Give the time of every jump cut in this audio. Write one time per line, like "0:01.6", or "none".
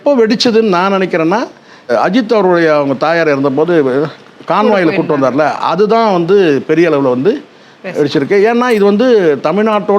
0:01.9